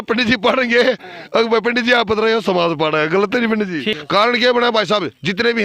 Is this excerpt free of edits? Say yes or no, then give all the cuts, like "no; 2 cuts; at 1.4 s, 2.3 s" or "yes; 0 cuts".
no; 1 cut; at 3.9 s